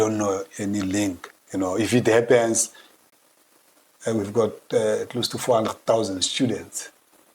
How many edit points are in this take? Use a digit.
1